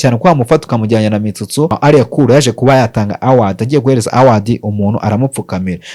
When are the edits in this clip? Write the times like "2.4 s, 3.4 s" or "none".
1.7 s